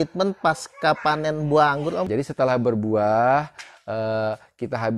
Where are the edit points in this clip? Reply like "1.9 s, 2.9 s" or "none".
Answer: 2.1 s